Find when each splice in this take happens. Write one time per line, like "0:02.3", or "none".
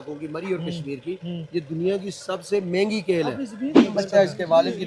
0:03.7